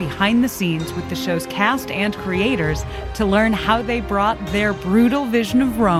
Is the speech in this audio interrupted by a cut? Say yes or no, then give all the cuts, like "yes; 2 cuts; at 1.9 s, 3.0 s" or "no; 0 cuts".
no; 0 cuts